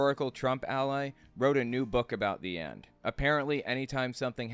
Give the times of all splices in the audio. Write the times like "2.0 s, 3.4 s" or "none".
none